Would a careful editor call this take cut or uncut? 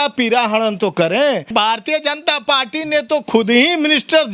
cut